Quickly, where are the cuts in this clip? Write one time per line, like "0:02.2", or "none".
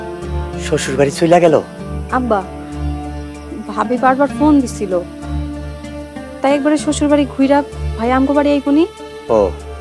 none